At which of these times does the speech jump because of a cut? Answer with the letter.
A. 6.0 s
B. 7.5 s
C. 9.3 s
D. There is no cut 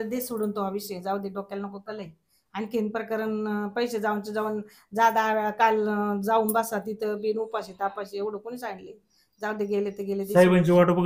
D